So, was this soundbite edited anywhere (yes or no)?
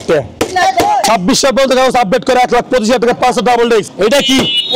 yes